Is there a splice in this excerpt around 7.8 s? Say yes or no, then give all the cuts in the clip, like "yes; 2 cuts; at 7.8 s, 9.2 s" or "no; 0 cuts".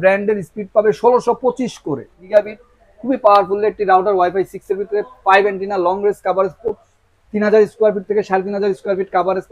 no; 1 cut; at 2.2 s